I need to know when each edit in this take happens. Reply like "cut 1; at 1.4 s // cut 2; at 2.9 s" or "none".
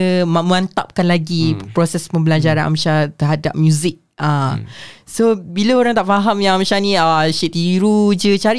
none